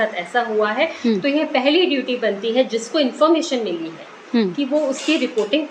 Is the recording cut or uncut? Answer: uncut